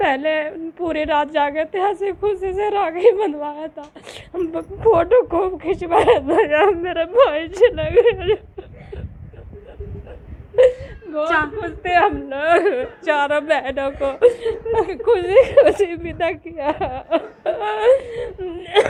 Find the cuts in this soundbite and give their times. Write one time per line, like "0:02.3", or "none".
none